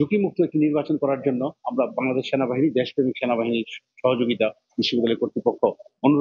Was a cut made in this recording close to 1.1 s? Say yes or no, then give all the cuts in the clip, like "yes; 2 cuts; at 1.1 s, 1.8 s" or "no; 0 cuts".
no; 0 cuts